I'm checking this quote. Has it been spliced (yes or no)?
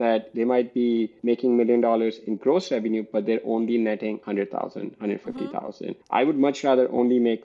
yes